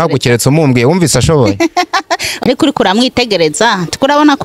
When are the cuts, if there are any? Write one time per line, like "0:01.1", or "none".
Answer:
0:02.3